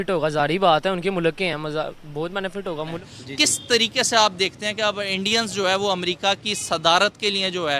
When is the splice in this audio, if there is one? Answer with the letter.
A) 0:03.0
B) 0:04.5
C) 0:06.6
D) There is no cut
A